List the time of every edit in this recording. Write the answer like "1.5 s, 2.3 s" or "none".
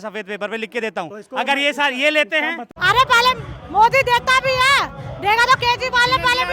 2.6 s